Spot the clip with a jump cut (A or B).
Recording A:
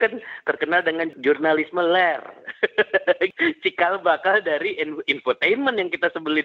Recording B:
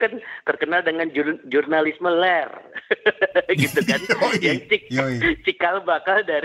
A